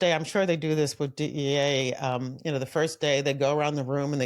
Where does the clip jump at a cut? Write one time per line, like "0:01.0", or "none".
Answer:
none